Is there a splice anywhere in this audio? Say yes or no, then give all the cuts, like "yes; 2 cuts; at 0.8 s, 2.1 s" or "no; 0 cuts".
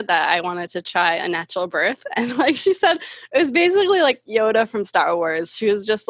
no; 0 cuts